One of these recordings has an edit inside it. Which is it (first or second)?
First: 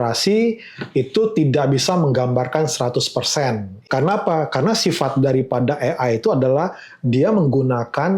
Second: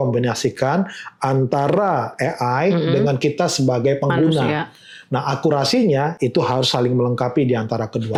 first